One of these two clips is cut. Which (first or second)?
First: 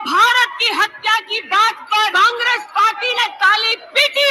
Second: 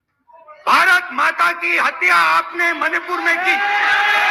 first